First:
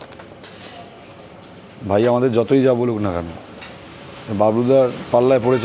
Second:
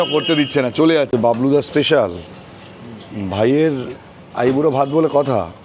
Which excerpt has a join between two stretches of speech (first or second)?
second